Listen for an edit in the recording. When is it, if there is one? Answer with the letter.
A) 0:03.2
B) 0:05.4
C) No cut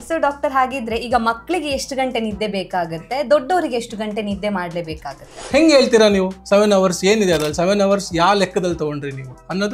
B